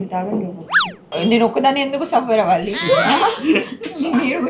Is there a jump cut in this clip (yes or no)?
yes